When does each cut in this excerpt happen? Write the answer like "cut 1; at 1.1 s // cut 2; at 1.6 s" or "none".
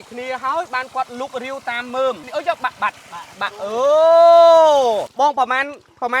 cut 1; at 2.2 s // cut 2; at 5.1 s